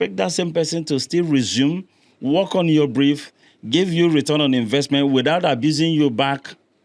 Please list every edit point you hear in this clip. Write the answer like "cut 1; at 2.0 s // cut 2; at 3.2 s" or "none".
none